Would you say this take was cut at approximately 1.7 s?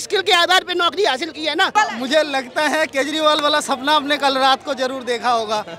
yes; 1 cut; at 1.7 s

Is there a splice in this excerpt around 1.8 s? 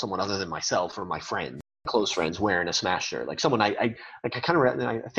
yes; 1 cut; at 1.8 s

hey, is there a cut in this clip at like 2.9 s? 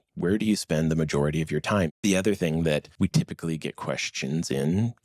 yes; 2 cuts; at 1.9 s, 2.9 s

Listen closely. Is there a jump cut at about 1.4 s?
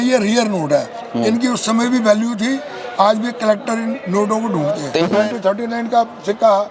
no; 1 cut; at 4.9 s

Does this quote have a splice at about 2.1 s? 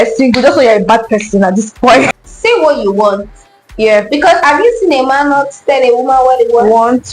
yes; 1 cut; at 2.1 s

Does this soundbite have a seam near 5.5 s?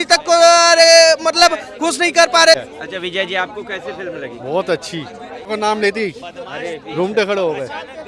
yes; 2 cuts; at 2.6 s, 5.5 s

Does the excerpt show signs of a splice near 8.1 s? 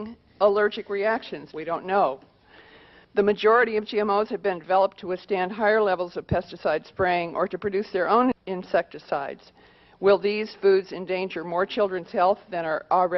yes; 1 cut; at 8.1 s

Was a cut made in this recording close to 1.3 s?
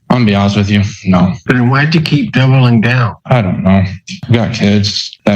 no; 2 cuts; at 3.1 s, 4.2 s

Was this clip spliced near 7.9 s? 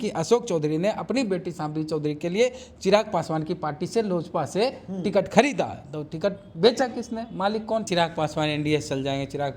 yes; 1 cut; at 7.9 s

